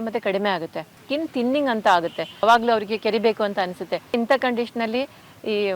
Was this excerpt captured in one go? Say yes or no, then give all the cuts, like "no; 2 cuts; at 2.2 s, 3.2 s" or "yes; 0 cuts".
no; 3 cuts; at 1.0 s, 2.4 s, 4.1 s